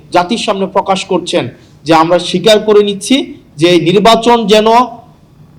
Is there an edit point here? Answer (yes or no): no